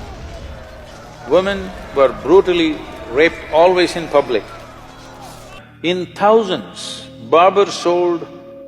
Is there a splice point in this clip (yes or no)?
yes